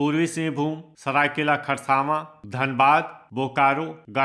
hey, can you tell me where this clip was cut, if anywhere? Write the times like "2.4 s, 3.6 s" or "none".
none